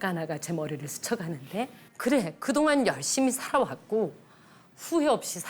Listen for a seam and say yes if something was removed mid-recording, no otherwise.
yes